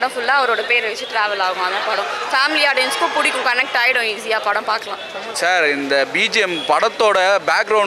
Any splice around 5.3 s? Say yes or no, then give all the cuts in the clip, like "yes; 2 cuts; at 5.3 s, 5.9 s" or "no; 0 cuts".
yes; 1 cut; at 5.3 s